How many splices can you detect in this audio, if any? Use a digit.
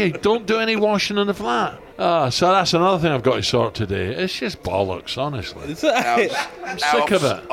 1